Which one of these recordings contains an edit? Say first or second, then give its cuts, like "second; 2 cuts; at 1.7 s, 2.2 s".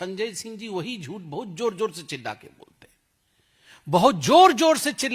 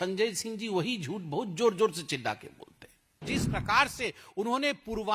second; 1 cut; at 3.4 s